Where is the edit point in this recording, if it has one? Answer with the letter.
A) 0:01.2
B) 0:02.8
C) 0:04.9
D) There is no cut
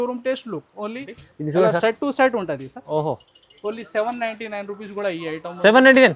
A